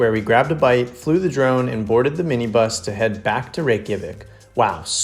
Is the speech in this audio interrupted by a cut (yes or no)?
no